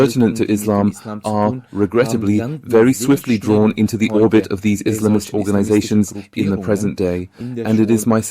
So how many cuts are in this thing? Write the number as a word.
one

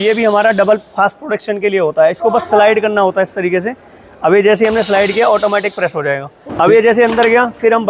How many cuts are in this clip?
one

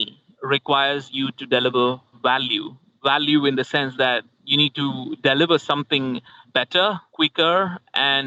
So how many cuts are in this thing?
one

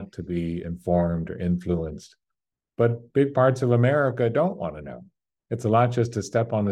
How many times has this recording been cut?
zero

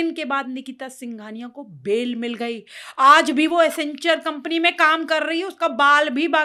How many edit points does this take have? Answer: zero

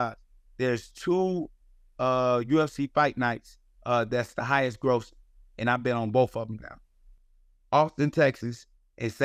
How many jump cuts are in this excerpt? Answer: zero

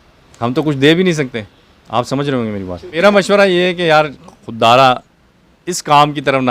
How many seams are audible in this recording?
one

